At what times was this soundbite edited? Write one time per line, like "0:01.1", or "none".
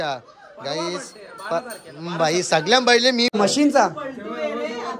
0:03.3

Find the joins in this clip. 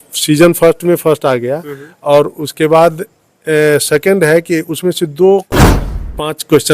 0:05.6

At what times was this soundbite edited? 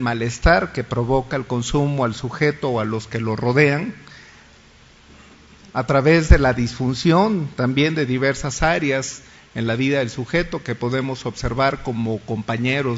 none

